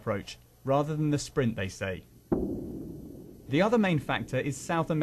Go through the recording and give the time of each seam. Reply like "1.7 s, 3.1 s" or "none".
1.7 s